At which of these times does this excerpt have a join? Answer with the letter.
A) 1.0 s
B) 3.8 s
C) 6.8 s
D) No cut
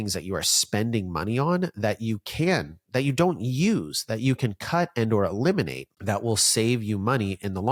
D